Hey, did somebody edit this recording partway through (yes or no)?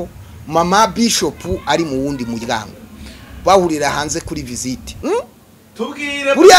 yes